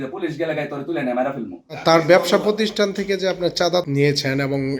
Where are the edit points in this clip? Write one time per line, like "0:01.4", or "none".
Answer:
0:01.8
0:03.9